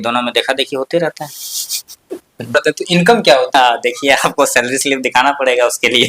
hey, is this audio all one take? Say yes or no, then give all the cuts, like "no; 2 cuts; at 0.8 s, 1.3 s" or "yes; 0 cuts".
no; 2 cuts; at 2.5 s, 3.5 s